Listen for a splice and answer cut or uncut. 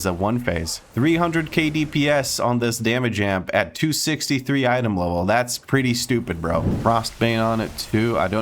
cut